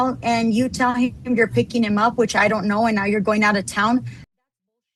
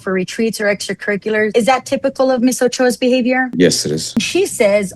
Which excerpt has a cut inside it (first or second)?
second